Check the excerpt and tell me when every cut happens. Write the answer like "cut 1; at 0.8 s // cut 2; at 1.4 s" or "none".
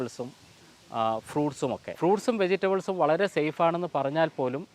cut 1; at 1.9 s